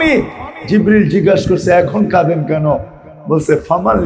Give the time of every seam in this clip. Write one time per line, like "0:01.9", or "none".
none